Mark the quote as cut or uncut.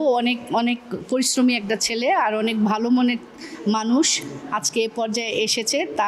uncut